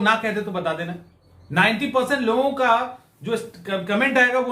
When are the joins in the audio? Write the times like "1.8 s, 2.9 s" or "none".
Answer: none

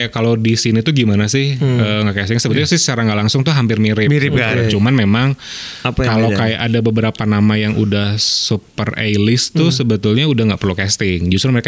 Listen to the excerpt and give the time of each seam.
none

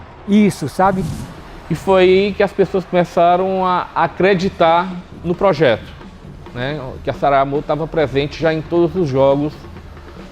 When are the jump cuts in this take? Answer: 1.0 s

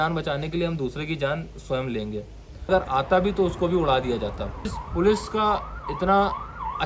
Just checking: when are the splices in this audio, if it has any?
2.7 s, 4.8 s

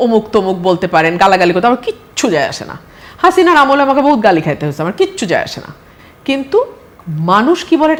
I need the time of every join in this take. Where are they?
none

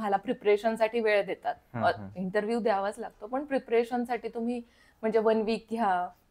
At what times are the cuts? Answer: none

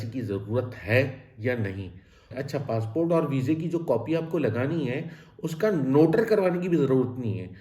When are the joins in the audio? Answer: 2.3 s

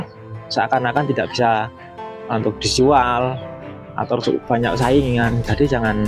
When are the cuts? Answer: none

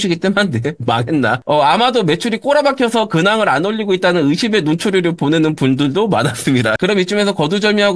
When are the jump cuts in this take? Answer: 1.4 s, 6.8 s

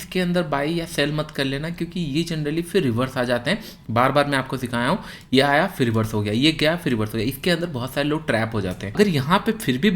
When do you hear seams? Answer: 9.0 s

